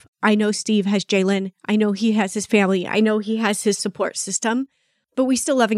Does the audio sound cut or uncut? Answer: uncut